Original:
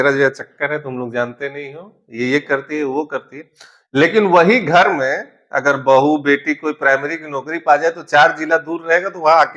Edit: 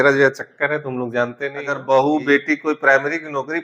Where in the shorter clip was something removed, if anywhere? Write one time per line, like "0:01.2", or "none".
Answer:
0:01.7